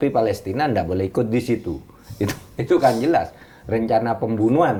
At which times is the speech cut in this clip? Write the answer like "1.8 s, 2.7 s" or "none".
none